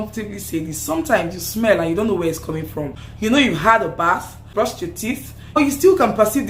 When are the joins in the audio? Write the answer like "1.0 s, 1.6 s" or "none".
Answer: 3.0 s, 4.4 s, 5.6 s